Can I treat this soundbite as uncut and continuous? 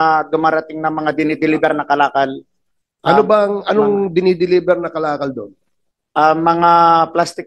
yes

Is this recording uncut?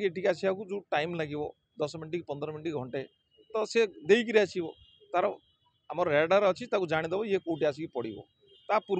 yes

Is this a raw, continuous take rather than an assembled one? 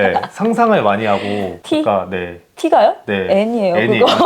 no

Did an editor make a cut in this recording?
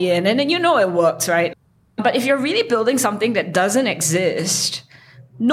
yes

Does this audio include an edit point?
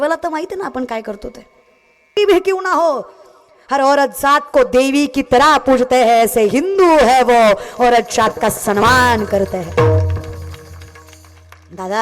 yes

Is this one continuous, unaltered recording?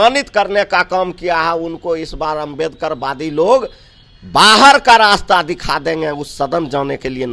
yes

